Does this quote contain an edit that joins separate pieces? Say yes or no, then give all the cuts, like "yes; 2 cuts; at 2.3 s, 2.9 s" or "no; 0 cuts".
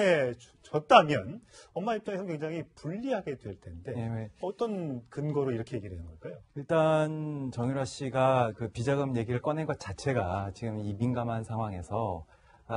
yes; 1 cut; at 3.9 s